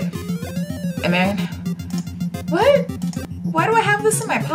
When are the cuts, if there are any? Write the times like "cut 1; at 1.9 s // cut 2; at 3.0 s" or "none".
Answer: cut 1; at 3.3 s